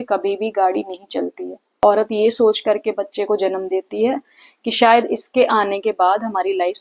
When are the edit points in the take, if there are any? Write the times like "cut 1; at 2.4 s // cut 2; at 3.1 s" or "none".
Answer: cut 1; at 1.7 s